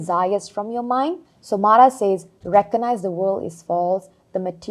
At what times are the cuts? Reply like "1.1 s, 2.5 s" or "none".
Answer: 1.3 s